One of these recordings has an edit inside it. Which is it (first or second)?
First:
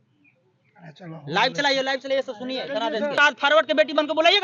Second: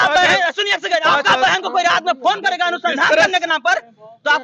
first